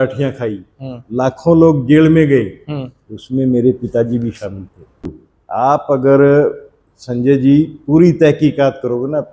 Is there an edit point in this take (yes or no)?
yes